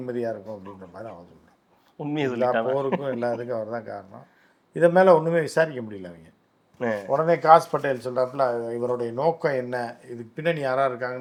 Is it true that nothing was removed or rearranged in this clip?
yes; 0 cuts

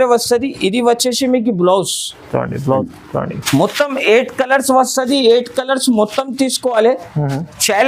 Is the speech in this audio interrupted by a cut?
yes; 1 cut; at 2.9 s

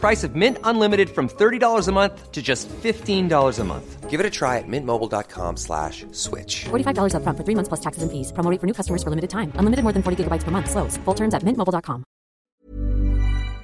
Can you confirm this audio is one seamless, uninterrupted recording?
no; 1 cut; at 12.5 s

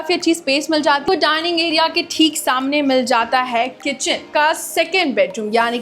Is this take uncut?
no; 2 cuts; at 1.0 s, 4.3 s

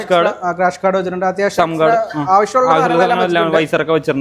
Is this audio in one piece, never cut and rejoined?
yes; 0 cuts

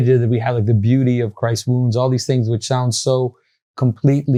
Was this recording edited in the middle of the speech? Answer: no; 0 cuts

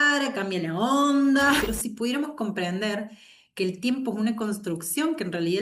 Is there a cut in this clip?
yes; 1 cut; at 1.6 s

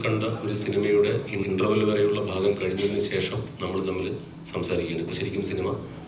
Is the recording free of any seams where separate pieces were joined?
no; 1 cut; at 1.4 s

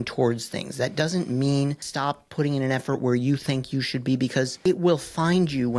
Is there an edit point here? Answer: yes; 2 cuts; at 1.9 s, 4.5 s

